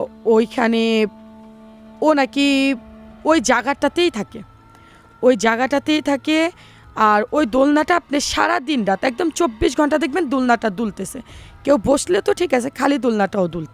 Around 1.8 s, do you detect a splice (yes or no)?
no